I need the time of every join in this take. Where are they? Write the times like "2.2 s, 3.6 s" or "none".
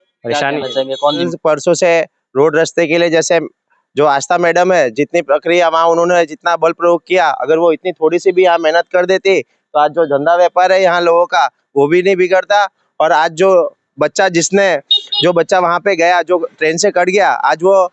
1.2 s